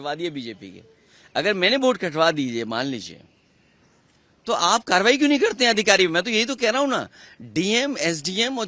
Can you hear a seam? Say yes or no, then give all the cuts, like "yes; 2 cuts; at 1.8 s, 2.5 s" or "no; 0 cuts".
no; 0 cuts